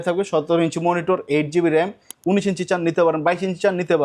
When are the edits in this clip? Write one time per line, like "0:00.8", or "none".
0:02.1